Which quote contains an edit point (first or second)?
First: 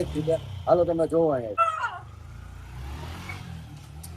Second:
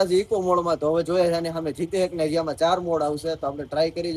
first